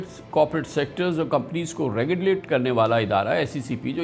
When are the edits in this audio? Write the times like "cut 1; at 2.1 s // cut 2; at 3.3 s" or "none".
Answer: none